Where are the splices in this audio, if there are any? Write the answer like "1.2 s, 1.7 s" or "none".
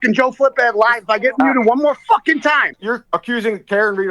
3.0 s